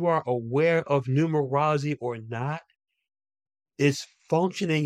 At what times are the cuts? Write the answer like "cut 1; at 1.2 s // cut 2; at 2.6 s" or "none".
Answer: cut 1; at 3.7 s